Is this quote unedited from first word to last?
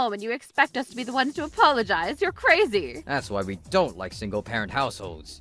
no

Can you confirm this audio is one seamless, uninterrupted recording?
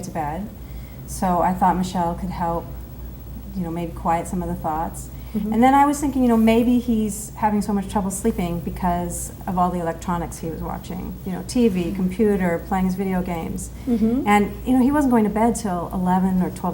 no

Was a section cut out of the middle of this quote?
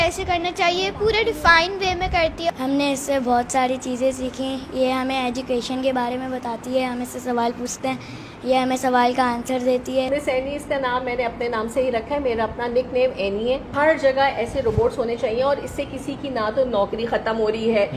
yes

